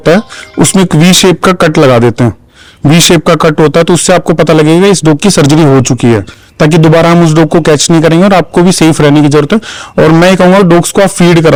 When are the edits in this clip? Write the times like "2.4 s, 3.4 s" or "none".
none